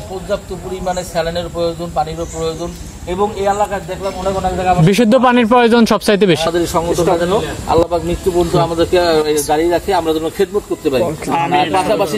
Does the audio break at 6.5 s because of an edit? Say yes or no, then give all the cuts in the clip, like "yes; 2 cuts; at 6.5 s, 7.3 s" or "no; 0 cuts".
yes; 1 cut; at 6.5 s